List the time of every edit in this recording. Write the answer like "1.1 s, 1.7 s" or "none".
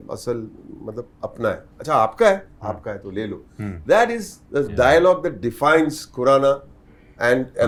none

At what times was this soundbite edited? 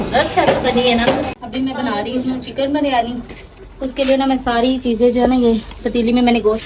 1.4 s

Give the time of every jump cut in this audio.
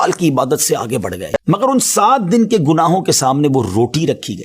1.2 s

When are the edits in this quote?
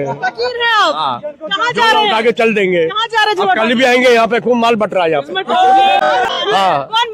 6.2 s

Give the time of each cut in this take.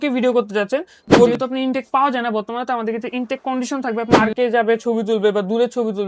1.3 s, 4.2 s

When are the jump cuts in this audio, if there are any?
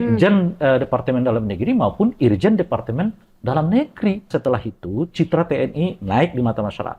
4.3 s

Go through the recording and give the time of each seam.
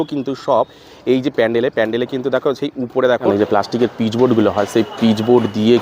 3.3 s

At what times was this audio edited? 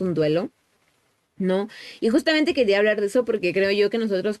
none

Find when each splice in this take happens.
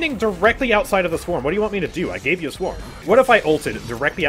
2.9 s

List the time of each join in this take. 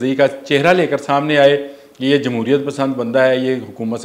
none

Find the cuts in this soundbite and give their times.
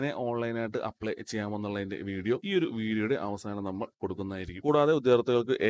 4.6 s

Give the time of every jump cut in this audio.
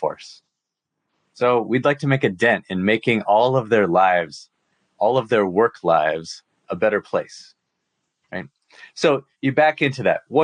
none

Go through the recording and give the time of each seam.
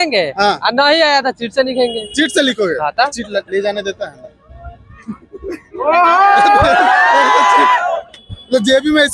none

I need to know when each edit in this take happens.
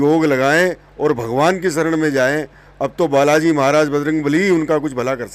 none

